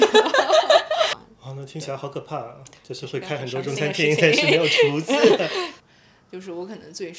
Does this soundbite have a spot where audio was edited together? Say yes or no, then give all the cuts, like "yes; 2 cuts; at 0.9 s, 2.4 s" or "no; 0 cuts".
yes; 2 cuts; at 1.2 s, 5.8 s